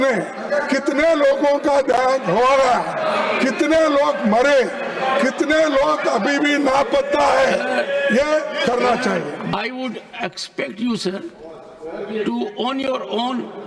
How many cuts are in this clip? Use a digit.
1